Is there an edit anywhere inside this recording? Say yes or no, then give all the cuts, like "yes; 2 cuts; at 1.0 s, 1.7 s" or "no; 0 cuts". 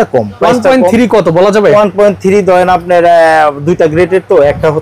no; 0 cuts